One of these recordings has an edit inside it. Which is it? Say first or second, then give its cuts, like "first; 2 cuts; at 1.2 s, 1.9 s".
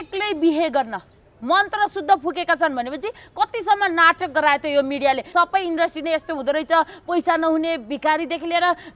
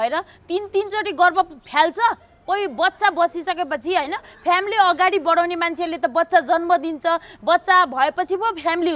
first; 1 cut; at 5.3 s